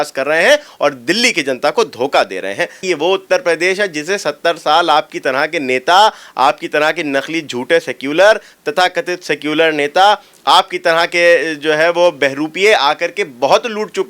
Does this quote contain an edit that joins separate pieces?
yes; 1 cut; at 2.8 s

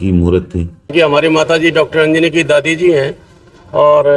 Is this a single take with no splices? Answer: no; 1 cut; at 0.9 s

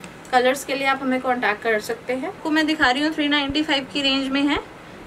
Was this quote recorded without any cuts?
no; 1 cut; at 2.4 s

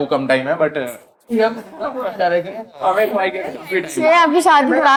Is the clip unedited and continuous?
yes; 0 cuts

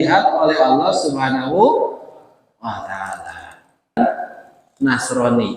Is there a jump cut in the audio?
yes; 1 cut; at 4.0 s

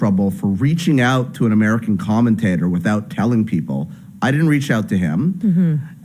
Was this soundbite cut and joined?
no; 0 cuts

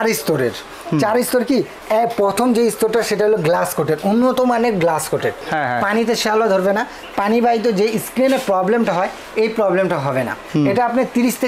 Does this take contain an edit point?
yes; 2 cuts; at 5.4 s, 10.4 s

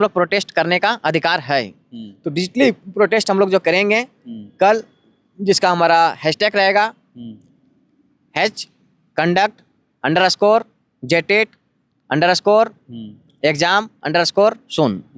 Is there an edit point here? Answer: no; 0 cuts

